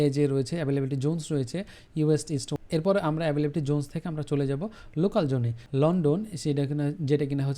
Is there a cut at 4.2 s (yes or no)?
no